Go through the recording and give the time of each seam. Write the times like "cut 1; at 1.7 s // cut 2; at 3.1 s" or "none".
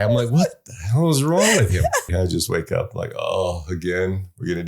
cut 1; at 2.1 s